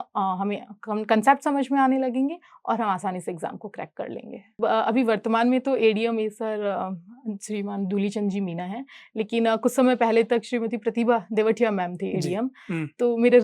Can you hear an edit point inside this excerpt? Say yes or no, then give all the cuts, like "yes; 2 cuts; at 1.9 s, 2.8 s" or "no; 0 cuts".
yes; 1 cut; at 4.6 s